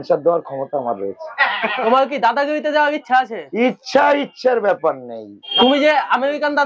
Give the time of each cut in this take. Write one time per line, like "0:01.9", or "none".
0:01.8
0:05.6

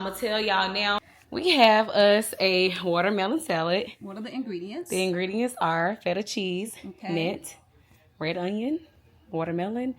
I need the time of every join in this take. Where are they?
0:01.0

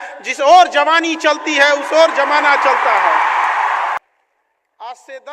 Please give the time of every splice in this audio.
0:04.0

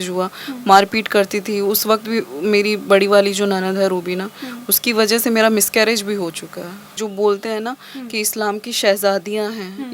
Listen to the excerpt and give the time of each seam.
0:07.0

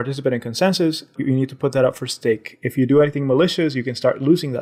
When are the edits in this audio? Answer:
none

